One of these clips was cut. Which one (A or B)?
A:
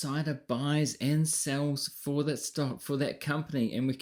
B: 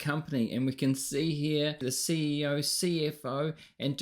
B